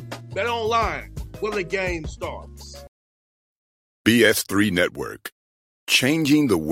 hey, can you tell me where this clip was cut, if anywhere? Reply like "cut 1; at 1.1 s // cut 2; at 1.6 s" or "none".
cut 1; at 2.9 s